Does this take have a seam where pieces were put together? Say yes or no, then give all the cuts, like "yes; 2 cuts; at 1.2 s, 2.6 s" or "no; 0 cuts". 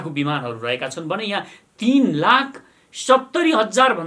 no; 0 cuts